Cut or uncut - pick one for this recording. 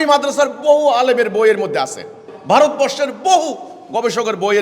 cut